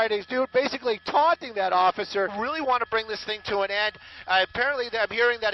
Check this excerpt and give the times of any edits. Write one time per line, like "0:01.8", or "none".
none